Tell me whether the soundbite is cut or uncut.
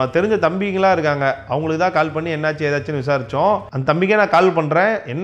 uncut